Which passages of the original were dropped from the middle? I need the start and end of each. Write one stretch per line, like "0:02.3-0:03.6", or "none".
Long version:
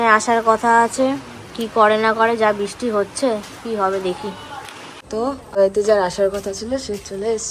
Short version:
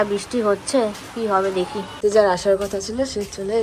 0:04.5-0:05.7